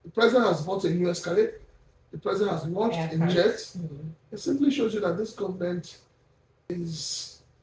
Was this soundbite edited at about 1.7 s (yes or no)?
no